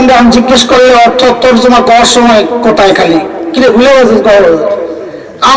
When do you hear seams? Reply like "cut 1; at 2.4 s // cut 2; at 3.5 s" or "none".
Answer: none